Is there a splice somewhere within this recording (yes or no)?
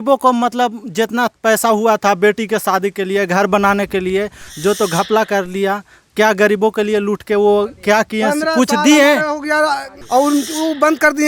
yes